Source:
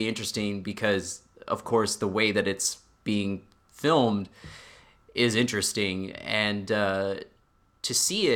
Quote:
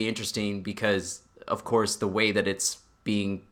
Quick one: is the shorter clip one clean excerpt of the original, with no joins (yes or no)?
yes